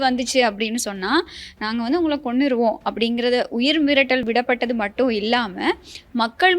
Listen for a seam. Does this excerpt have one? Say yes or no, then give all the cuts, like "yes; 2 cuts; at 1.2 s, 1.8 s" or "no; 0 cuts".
yes; 1 cut; at 4.2 s